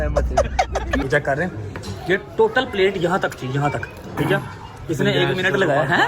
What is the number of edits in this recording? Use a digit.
1